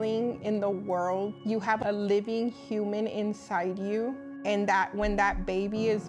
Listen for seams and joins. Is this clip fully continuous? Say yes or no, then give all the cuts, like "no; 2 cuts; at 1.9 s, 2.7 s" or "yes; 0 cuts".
no; 2 cuts; at 1.5 s, 4.3 s